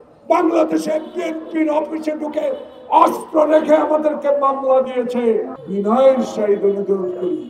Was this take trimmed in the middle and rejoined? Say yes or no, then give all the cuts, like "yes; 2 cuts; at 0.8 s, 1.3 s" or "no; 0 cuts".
yes; 1 cut; at 5.6 s